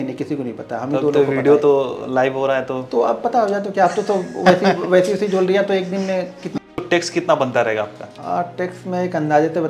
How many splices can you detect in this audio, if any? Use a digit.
2